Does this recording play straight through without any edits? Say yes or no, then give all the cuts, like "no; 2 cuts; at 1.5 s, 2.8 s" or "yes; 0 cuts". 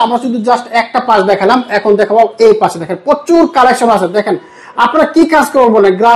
yes; 0 cuts